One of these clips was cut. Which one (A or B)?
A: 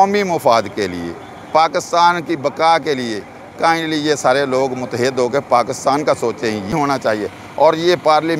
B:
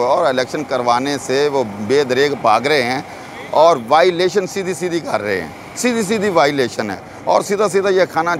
A